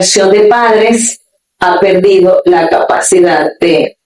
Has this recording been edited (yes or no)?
no